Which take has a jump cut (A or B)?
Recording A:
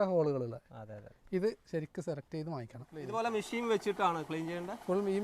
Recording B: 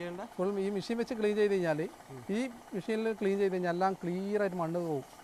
A